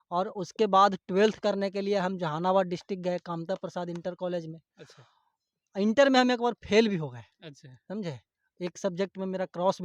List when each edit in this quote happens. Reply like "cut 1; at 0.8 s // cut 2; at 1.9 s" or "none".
none